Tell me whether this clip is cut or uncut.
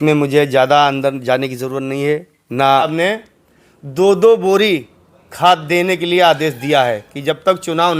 cut